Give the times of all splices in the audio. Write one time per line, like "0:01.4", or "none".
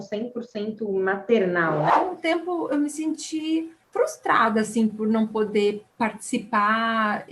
0:01.9
0:03.8
0:05.9